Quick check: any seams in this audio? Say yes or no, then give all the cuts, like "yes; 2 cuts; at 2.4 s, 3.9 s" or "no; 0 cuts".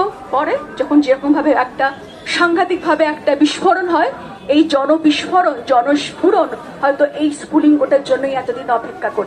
no; 0 cuts